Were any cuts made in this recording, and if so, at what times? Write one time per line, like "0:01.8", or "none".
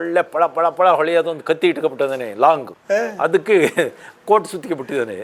0:02.7